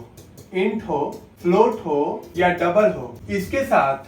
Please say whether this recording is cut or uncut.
cut